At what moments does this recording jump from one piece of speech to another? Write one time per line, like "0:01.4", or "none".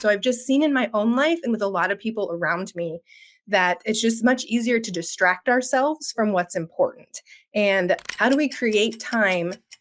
0:08.1